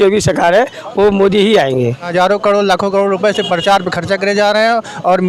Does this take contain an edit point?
yes; 1 cut; at 2.0 s

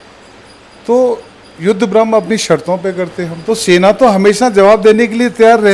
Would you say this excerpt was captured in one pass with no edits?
no; 1 cut; at 3.3 s

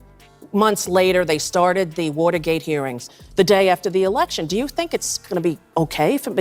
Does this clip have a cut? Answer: yes; 1 cut; at 3.2 s

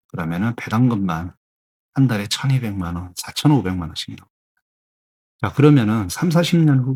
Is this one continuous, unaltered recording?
yes; 0 cuts

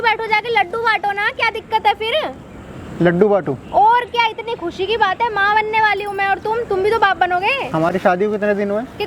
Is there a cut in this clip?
no; 0 cuts

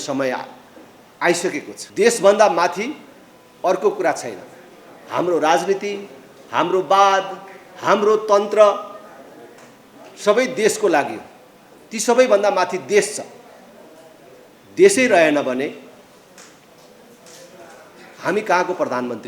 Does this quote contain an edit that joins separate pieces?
yes; 1 cut; at 1.8 s

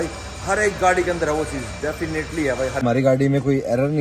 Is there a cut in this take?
yes; 1 cut; at 2.8 s

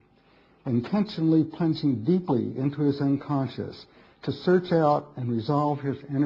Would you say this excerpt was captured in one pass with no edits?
yes; 0 cuts

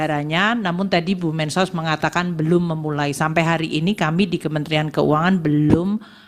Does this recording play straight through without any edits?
yes; 0 cuts

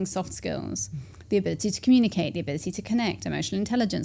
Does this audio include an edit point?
no; 0 cuts

